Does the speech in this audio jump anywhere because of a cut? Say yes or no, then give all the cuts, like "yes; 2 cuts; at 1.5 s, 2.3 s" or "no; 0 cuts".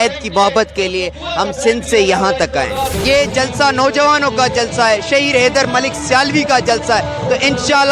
yes; 1 cut; at 2.9 s